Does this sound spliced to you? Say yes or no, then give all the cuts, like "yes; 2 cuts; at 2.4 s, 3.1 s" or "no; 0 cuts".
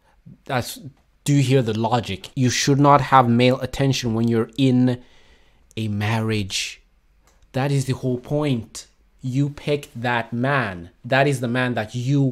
yes; 1 cut; at 2.2 s